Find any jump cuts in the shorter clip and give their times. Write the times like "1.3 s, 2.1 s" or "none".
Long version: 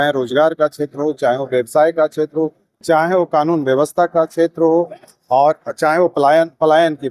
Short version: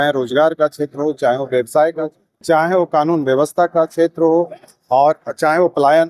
2.0 s